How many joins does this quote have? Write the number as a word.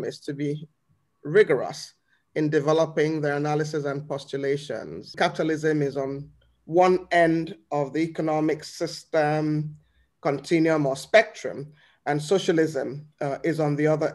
one